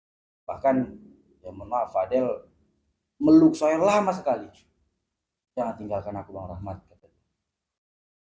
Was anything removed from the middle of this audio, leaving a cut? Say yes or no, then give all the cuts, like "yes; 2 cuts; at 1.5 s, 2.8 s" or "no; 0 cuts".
no; 0 cuts